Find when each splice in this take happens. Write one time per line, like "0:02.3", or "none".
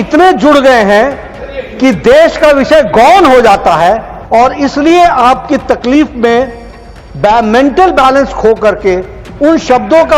0:04.1